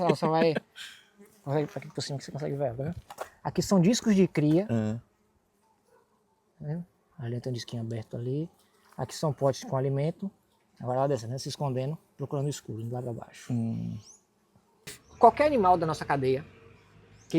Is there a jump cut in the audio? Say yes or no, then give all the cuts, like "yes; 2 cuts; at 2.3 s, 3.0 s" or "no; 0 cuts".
yes; 1 cut; at 15.0 s